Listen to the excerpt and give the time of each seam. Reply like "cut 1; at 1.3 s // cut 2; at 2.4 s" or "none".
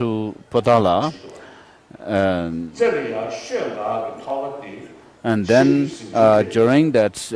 cut 1; at 1.0 s